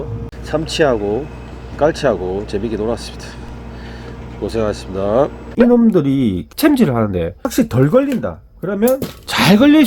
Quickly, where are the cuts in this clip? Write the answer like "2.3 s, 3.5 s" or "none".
5.4 s, 6.4 s, 7.4 s